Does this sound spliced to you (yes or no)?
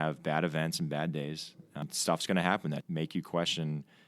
yes